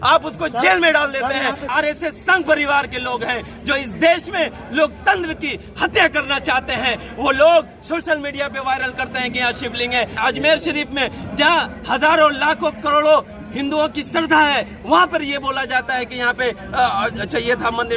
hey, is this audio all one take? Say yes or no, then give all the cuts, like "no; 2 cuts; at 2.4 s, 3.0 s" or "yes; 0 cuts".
no; 2 cuts; at 1.7 s, 10.2 s